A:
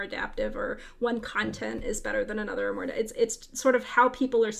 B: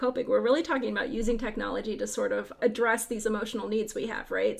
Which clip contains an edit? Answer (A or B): B